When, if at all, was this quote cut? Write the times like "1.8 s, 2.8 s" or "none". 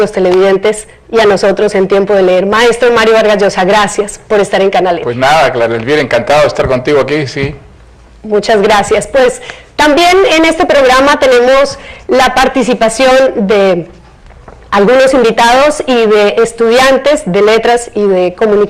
none